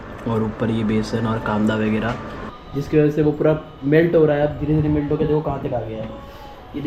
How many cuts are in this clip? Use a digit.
1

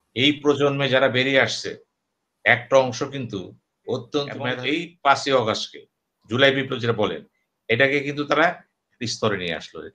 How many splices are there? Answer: 1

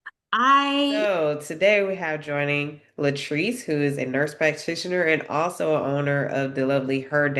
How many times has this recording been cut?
1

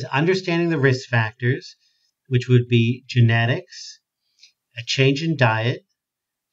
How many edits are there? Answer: 0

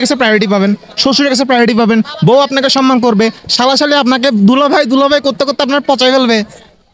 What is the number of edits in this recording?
0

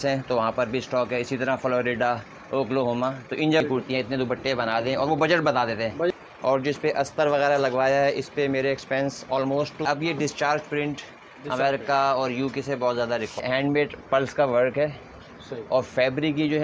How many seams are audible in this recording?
4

